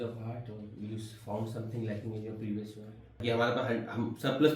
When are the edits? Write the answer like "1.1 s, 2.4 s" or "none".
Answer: 3.2 s